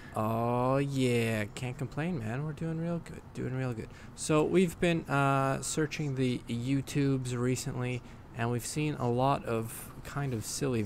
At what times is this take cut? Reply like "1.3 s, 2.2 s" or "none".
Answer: none